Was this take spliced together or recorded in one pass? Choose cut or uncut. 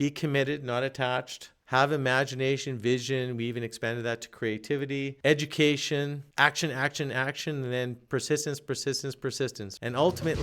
uncut